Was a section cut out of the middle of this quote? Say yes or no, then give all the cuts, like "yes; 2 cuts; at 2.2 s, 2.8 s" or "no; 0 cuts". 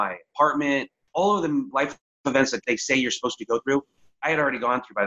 yes; 3 cuts; at 1.0 s, 1.7 s, 2.6 s